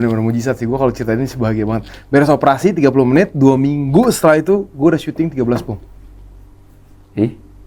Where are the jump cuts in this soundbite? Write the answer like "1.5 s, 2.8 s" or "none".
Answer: none